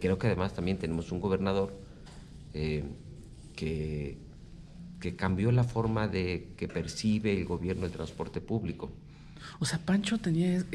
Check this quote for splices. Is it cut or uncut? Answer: uncut